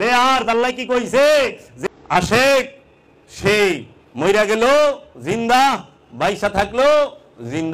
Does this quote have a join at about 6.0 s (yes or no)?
no